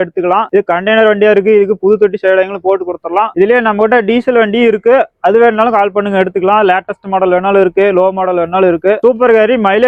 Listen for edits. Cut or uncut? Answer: uncut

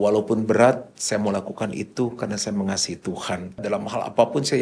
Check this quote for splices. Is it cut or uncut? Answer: cut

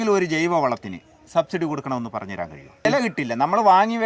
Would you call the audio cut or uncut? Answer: cut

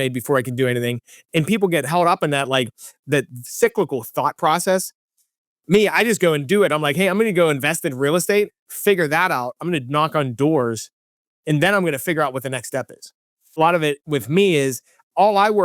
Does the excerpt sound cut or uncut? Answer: cut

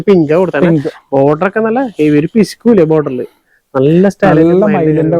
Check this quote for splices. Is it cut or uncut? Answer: uncut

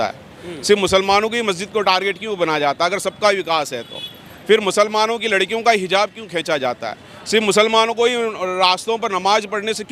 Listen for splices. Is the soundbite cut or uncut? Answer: uncut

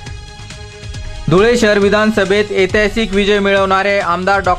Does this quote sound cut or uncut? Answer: uncut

